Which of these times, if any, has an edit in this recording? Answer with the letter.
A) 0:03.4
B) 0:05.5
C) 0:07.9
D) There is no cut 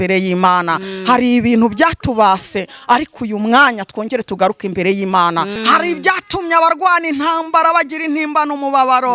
B